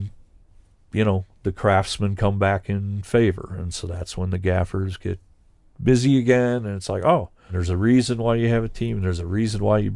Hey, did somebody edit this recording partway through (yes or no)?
yes